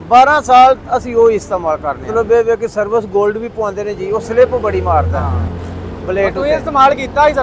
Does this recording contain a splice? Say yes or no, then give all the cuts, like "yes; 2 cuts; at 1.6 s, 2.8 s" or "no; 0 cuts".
yes; 2 cuts; at 2.0 s, 5.3 s